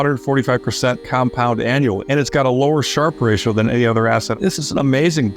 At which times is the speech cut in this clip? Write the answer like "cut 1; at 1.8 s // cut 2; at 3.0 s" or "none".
cut 1; at 2.0 s // cut 2; at 4.3 s